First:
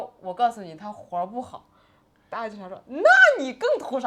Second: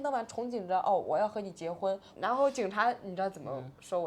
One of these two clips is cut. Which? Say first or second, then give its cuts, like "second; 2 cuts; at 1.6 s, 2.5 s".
second; 1 cut; at 2.1 s